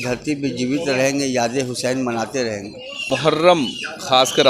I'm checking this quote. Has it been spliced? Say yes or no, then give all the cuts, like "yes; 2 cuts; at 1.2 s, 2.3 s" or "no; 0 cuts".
yes; 1 cut; at 3.1 s